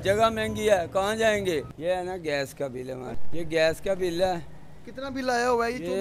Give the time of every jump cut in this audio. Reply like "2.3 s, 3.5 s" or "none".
1.7 s, 3.2 s